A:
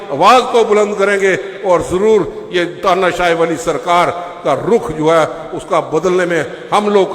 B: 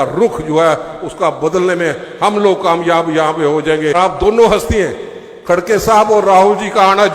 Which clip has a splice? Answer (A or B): B